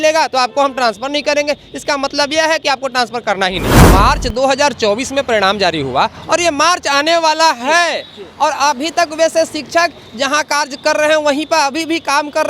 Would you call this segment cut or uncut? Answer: cut